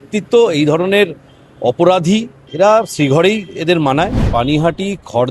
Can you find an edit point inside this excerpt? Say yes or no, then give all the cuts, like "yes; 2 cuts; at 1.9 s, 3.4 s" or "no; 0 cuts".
yes; 2 cuts; at 2.4 s, 4.2 s